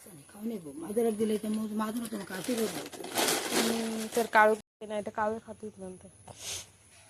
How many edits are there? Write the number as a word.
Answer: one